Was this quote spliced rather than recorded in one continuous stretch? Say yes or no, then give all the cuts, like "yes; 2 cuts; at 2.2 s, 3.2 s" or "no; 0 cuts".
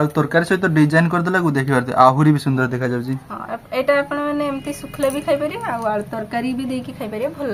no; 0 cuts